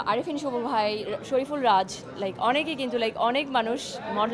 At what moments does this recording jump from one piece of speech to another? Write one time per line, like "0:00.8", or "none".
none